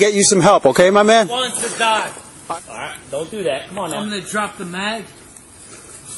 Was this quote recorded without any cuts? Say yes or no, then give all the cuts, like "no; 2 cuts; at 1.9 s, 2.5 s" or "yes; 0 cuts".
no; 1 cut; at 2.3 s